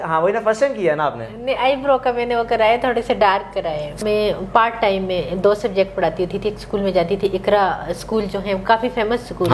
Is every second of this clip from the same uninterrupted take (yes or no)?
no